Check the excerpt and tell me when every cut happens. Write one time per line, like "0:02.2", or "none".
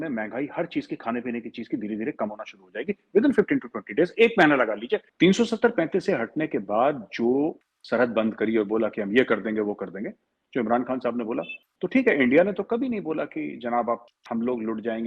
0:05.1
0:07.7
0:11.6
0:14.1